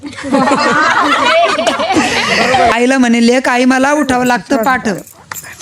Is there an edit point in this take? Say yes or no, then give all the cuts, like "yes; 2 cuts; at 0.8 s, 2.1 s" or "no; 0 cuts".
yes; 1 cut; at 2.7 s